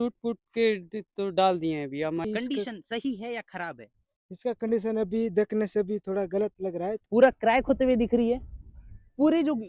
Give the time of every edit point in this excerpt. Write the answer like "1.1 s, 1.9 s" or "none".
2.2 s, 7.0 s